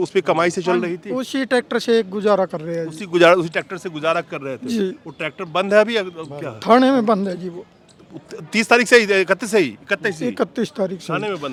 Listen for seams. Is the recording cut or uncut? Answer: uncut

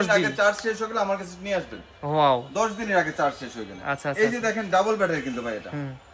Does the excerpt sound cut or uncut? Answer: uncut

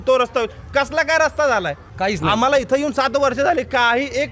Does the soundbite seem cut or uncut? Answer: cut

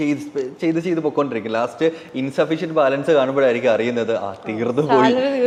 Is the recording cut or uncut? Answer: uncut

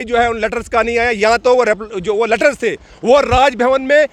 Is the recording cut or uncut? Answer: uncut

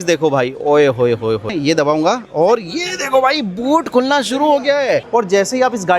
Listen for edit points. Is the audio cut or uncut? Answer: cut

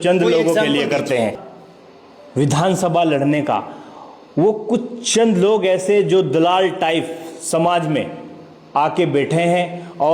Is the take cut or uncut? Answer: cut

